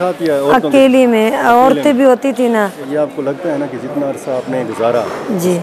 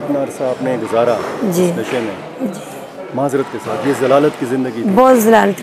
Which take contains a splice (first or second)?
first